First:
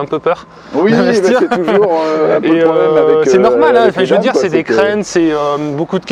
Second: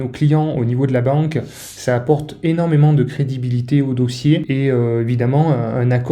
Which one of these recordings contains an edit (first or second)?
second